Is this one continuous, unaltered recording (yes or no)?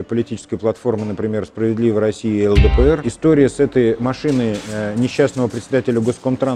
no